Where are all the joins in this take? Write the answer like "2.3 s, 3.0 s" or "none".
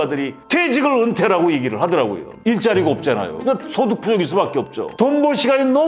2.4 s